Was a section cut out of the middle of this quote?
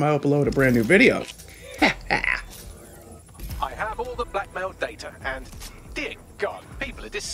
yes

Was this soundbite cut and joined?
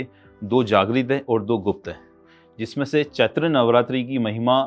no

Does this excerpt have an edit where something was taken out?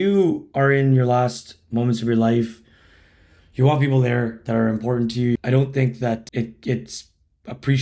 yes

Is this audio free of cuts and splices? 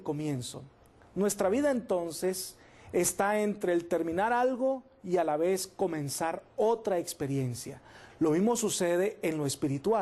yes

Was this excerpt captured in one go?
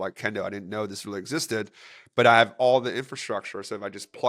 yes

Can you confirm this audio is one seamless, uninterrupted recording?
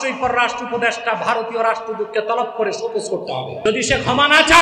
no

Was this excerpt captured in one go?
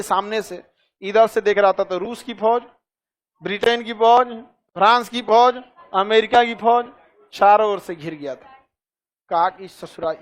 yes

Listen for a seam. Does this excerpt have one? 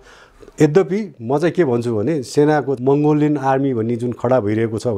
yes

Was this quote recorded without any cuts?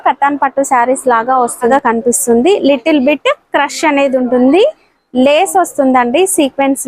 no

